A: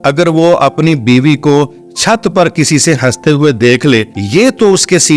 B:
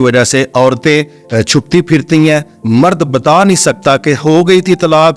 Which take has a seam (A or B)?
A